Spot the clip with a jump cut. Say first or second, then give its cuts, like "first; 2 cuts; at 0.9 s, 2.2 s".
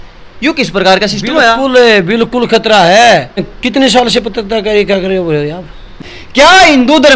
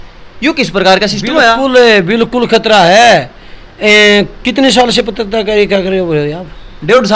first; 2 cuts; at 3.5 s, 6.0 s